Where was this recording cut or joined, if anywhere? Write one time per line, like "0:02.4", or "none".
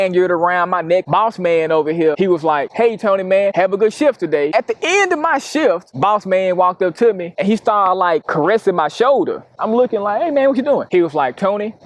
0:01.0
0:04.5